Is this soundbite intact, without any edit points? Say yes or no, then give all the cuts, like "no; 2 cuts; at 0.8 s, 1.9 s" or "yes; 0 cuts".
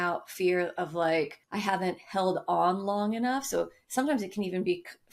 no; 1 cut; at 1.4 s